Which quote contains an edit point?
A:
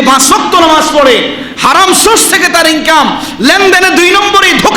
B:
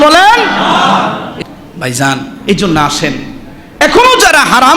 B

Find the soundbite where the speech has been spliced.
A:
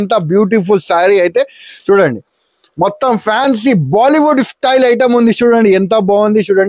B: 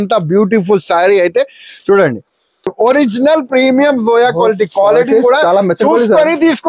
B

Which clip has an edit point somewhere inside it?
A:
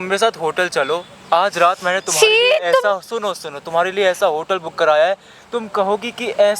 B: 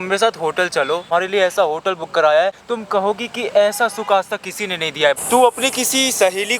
B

